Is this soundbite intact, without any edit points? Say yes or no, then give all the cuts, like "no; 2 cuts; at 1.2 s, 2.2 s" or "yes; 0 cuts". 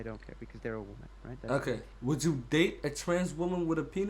no; 1 cut; at 1.9 s